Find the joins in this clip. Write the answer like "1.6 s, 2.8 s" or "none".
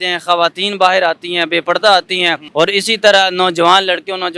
2.4 s